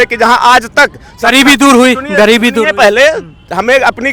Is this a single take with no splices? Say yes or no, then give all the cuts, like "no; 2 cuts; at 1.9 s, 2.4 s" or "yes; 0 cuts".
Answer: yes; 0 cuts